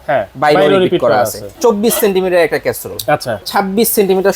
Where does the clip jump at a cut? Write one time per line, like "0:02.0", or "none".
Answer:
0:01.5
0:03.5